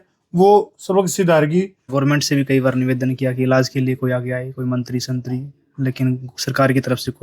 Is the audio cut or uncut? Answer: cut